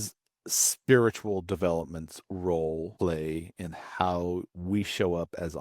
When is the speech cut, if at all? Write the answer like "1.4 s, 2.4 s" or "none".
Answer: 2.9 s, 4.5 s